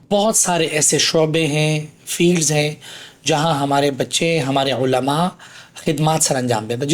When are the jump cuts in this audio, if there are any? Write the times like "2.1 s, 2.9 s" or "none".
none

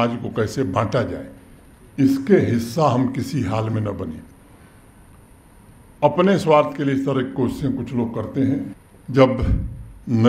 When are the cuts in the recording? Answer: 8.8 s

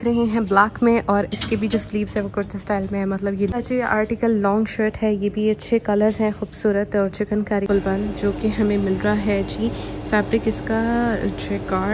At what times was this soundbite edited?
3.5 s, 7.7 s

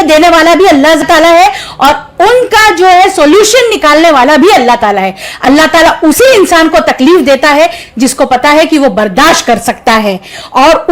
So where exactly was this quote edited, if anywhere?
none

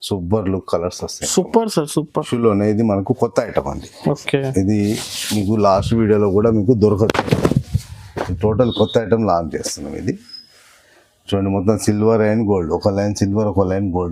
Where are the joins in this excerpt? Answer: 2.3 s

